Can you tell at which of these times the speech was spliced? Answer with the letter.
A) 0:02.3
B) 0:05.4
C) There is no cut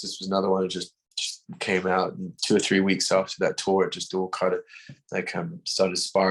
A